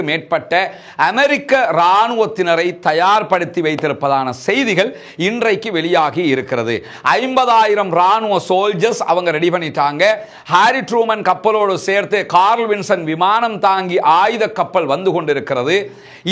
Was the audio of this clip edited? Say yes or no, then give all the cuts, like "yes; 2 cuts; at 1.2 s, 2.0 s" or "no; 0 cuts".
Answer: no; 0 cuts